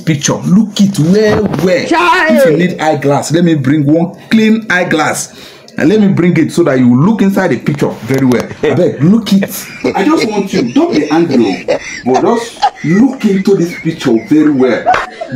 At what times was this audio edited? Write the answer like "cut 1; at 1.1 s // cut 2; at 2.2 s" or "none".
none